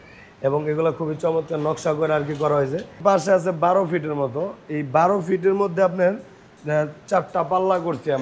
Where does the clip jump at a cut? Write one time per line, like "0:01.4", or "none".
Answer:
0:03.0